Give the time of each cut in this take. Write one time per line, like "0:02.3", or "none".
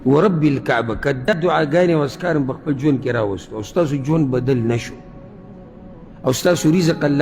0:01.3